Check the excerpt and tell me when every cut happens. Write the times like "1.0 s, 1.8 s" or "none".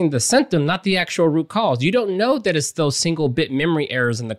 none